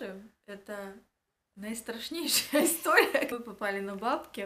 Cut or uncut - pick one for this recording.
cut